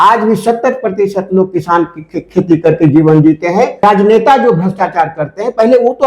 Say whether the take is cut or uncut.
cut